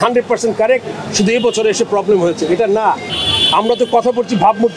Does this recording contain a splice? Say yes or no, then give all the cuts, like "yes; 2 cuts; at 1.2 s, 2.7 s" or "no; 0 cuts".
yes; 1 cut; at 3.1 s